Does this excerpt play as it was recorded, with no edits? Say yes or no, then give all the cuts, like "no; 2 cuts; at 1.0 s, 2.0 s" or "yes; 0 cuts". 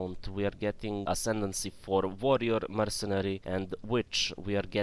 no; 2 cuts; at 1.1 s, 3.4 s